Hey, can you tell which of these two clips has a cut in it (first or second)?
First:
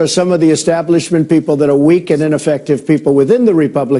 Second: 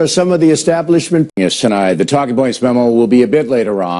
first